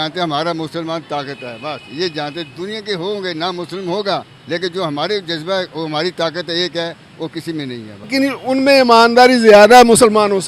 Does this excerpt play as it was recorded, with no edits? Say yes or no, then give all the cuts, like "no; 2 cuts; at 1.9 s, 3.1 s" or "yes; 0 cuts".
no; 1 cut; at 8.1 s